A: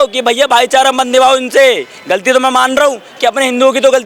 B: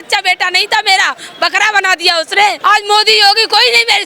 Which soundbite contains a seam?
B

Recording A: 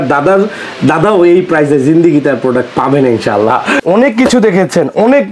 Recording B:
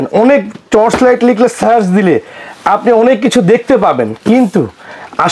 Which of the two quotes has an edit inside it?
A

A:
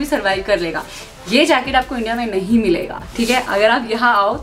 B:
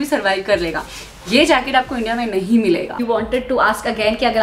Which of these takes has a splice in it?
B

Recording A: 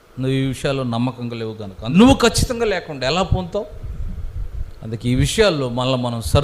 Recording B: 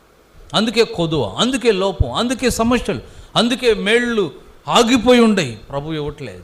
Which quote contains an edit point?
A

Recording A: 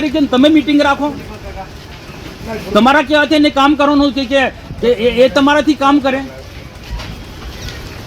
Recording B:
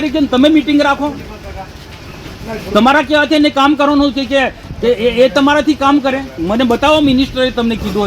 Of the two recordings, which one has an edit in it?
B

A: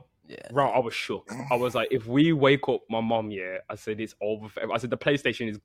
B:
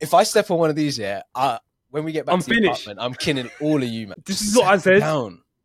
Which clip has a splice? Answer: B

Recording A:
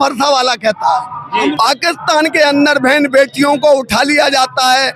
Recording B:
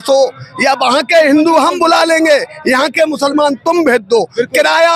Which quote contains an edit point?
A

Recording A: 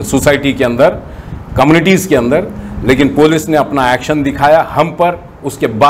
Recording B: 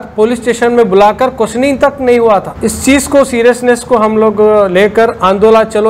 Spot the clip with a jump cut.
B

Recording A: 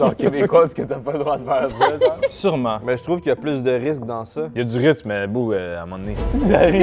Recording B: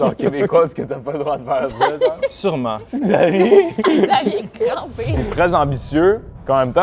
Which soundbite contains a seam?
B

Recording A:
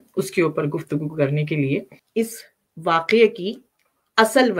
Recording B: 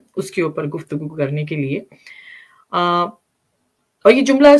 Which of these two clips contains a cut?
A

